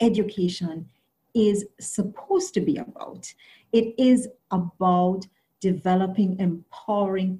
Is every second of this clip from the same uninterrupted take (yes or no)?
yes